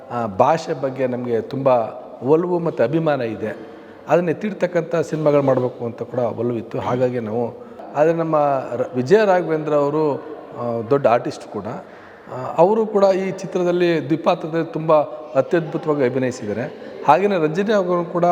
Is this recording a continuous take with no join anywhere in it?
no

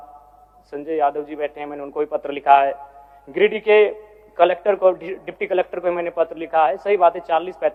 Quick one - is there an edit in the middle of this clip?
no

